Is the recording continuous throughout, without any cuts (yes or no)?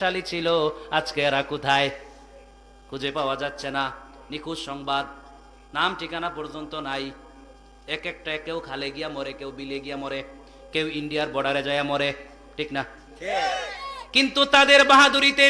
yes